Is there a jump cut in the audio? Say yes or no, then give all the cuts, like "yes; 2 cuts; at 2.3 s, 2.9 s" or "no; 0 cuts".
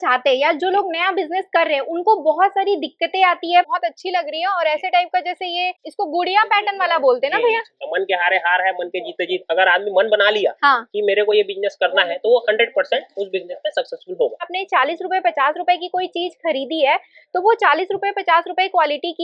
yes; 4 cuts; at 3.7 s, 5.9 s, 7.8 s, 14.5 s